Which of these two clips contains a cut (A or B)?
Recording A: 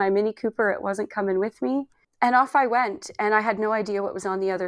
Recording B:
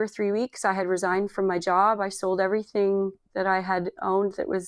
A